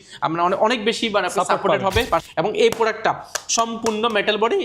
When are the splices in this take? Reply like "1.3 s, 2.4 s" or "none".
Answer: 2.3 s